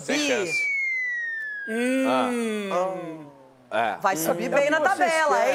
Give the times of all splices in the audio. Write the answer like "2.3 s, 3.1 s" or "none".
none